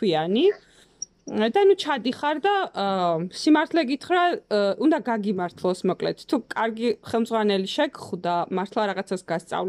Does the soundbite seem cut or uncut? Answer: uncut